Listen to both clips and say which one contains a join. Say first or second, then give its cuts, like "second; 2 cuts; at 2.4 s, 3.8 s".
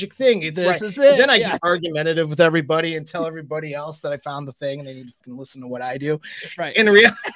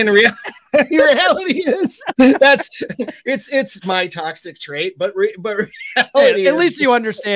first; 1 cut; at 5.2 s